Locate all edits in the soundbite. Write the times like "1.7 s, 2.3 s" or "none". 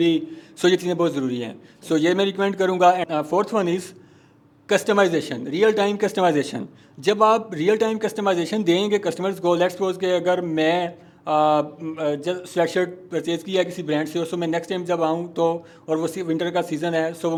none